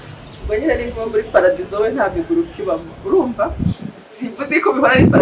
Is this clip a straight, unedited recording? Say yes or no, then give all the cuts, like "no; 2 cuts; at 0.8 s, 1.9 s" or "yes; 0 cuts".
yes; 0 cuts